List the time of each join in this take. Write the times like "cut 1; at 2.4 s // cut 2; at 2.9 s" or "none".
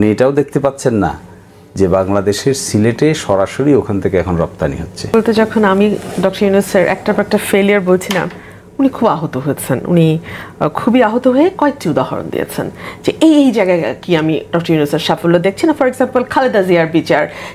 cut 1; at 5.1 s